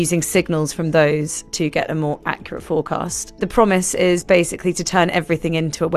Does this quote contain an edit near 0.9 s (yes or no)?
no